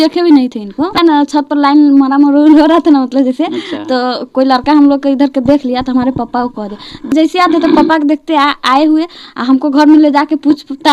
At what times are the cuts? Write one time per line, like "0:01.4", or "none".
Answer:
0:00.9
0:07.1